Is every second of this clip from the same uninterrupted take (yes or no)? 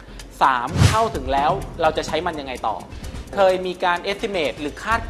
no